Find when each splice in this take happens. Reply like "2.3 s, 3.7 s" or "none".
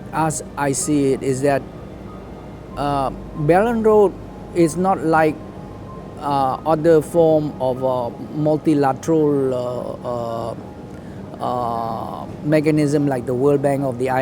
none